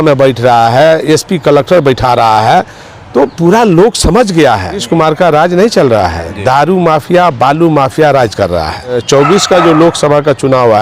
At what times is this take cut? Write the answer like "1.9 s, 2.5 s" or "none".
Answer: 4.8 s, 9.0 s